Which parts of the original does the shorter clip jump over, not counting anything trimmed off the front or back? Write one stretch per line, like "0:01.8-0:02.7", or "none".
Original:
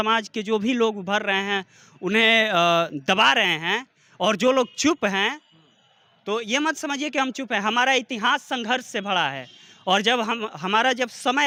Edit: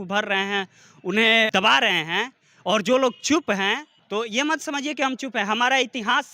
0:02.5-0:03.0
0:05.5-0:06.1